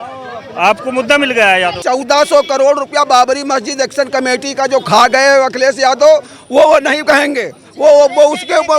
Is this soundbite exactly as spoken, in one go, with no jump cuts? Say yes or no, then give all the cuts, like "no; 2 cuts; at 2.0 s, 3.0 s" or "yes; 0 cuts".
no; 1 cut; at 1.8 s